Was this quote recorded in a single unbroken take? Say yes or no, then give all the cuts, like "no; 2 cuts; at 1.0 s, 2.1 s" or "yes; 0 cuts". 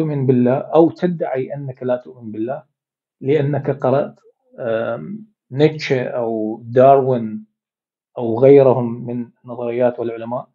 yes; 0 cuts